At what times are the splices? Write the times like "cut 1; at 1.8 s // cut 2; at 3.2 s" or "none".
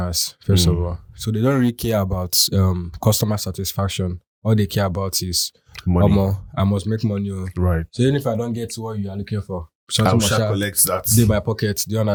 none